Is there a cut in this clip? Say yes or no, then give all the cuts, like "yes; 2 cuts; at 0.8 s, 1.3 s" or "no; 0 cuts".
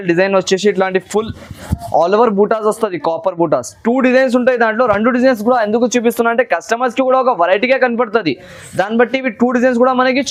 no; 0 cuts